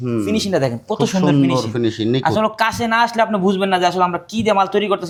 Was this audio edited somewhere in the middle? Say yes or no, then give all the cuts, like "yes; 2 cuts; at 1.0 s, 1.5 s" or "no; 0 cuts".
no; 0 cuts